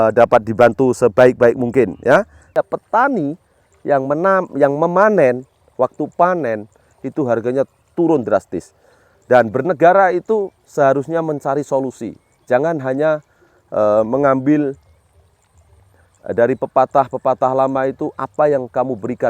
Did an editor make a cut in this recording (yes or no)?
yes